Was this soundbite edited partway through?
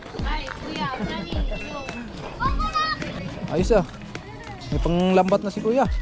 yes; 1 cut; at 3.1 s

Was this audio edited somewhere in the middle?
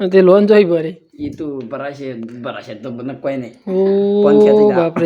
no; 0 cuts

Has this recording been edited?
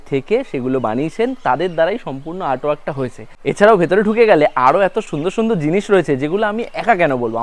no; 0 cuts

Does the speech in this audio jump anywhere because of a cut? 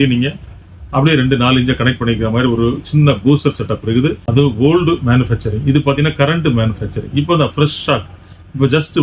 yes; 1 cut; at 4.2 s

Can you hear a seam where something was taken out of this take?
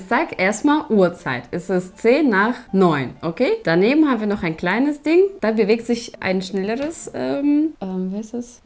no; 0 cuts

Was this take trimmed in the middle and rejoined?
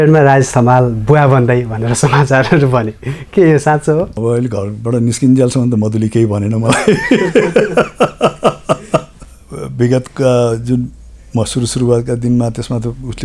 yes; 2 cuts; at 4.1 s, 9.2 s

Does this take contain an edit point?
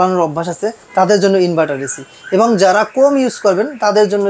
no; 0 cuts

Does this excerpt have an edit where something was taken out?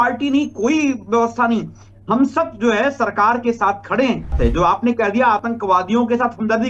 yes; 1 cut; at 4.3 s

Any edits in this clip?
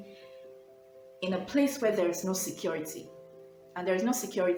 no; 0 cuts

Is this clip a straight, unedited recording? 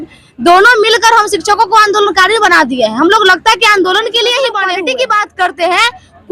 no; 1 cut; at 4.7 s

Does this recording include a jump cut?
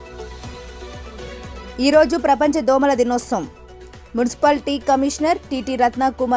yes; 1 cut; at 1.2 s

